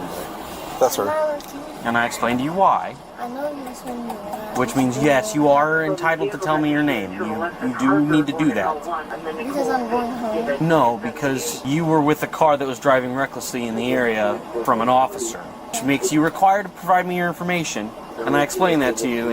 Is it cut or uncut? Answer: cut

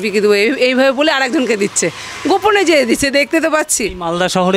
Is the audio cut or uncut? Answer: uncut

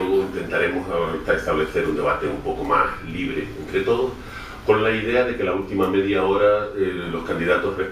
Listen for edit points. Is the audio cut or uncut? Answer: cut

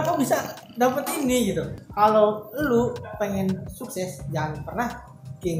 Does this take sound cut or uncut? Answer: cut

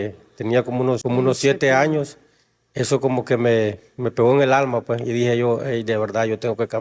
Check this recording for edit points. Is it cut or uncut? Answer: cut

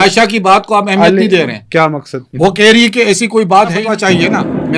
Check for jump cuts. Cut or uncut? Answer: cut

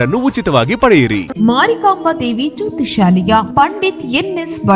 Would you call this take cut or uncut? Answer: cut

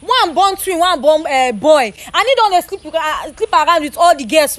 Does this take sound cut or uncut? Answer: uncut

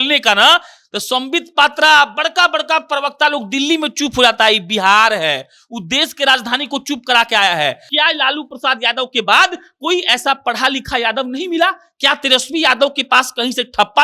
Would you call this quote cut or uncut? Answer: cut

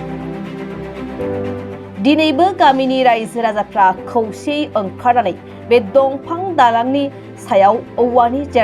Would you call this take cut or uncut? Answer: cut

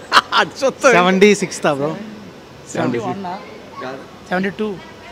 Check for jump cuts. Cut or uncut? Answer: uncut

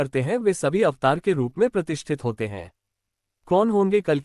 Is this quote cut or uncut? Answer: cut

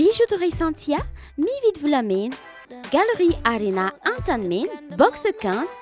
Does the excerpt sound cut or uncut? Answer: uncut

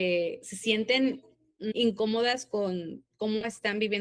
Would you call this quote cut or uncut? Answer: cut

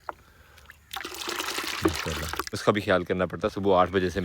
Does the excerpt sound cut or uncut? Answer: cut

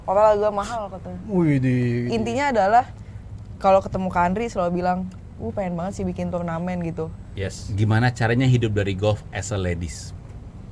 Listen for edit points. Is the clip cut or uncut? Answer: cut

